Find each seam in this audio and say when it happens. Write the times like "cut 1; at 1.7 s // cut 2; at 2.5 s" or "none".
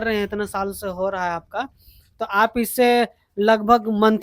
none